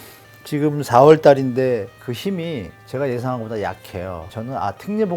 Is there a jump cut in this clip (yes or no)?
yes